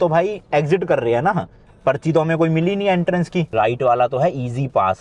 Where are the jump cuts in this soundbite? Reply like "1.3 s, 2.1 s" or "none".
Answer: 3.5 s